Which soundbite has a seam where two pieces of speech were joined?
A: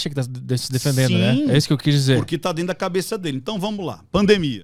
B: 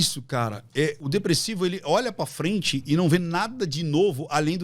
B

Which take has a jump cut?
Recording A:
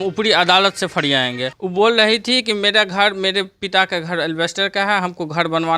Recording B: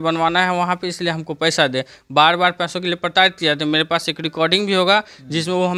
A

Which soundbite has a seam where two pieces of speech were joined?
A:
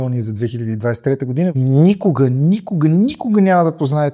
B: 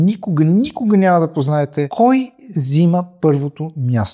A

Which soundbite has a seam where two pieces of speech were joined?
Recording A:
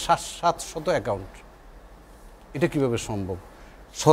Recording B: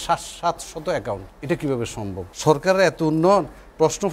B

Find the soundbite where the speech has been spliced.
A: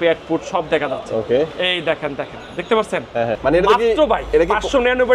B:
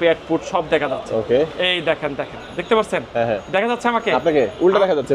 A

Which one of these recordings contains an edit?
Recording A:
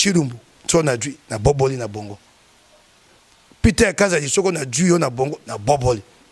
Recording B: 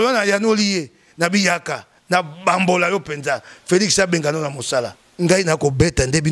B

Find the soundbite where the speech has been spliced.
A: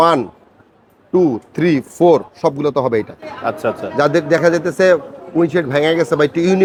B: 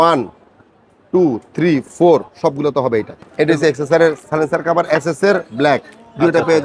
B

